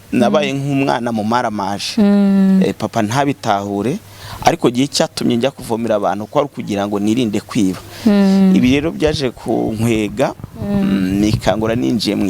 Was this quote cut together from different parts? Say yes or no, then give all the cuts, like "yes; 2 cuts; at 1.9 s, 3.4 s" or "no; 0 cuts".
no; 0 cuts